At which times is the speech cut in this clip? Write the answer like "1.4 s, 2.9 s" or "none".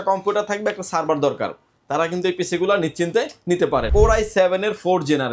3.9 s